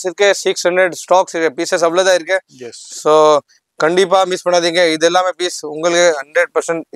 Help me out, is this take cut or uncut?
uncut